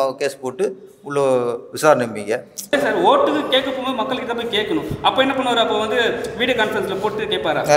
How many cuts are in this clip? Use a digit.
1